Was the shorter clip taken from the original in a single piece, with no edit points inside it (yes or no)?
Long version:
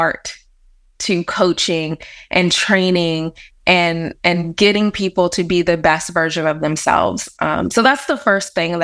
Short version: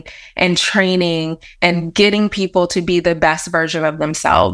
no